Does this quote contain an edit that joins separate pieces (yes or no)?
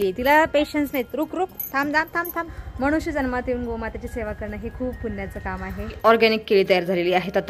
yes